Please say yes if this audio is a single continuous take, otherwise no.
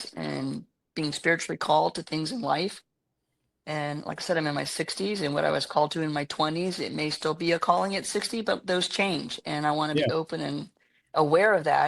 yes